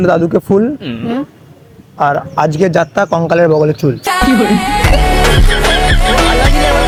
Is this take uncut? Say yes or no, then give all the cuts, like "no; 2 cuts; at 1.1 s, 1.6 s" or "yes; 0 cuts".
yes; 0 cuts